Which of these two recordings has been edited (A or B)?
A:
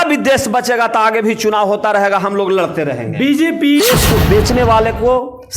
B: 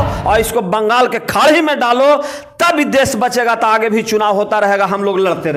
A